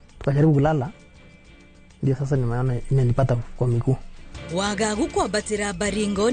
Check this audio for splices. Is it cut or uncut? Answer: cut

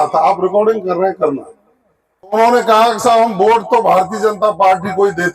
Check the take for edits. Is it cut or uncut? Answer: cut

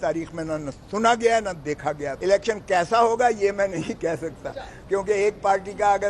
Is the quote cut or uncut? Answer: cut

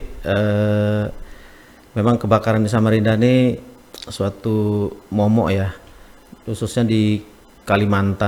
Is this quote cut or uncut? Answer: uncut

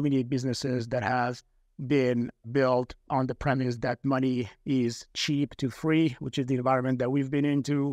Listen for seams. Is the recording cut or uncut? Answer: uncut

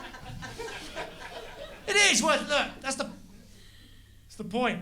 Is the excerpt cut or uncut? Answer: cut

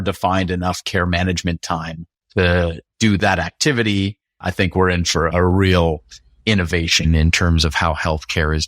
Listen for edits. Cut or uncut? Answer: cut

